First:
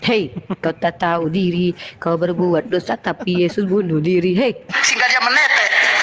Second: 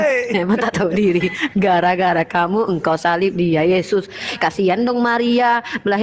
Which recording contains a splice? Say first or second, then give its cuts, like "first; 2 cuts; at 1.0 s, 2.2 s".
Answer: first; 1 cut; at 4.6 s